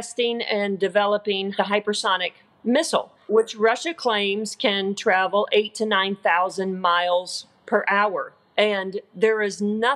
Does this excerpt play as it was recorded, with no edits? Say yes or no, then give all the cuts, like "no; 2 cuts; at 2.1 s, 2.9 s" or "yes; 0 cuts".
no; 3 cuts; at 1.5 s, 3.1 s, 8.3 s